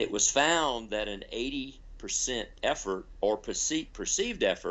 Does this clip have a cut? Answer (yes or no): no